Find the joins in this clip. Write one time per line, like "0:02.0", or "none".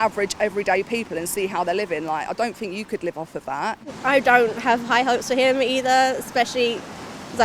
0:03.9